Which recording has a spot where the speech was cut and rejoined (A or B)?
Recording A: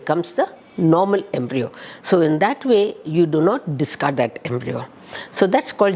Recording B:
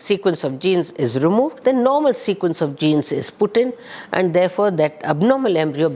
B